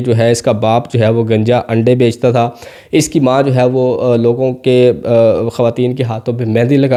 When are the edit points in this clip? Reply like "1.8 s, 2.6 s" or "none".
none